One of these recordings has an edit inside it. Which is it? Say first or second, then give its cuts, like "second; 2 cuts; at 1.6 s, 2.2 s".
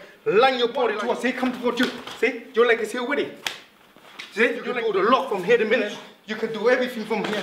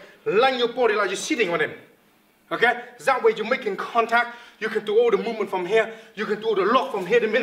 first; 2 cuts; at 1.0 s, 4.7 s